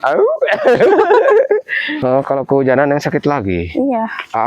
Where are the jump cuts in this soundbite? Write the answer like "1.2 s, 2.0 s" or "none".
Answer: 2.0 s